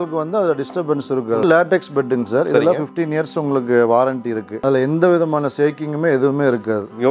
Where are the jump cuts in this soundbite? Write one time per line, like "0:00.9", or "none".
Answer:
0:01.4
0:04.6